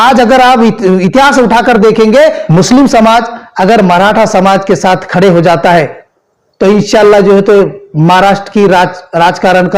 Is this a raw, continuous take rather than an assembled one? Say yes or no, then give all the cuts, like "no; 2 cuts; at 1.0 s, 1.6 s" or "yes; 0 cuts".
no; 1 cut; at 2.4 s